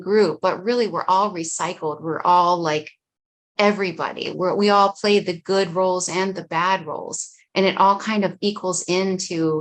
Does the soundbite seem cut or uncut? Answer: uncut